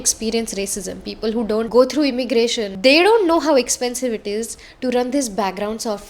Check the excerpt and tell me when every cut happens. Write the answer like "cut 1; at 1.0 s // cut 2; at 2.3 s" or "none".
cut 1; at 1.7 s // cut 2; at 2.7 s